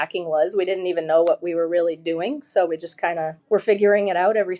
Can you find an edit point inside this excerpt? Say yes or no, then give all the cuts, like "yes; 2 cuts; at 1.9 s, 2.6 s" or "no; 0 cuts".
yes; 1 cut; at 3.4 s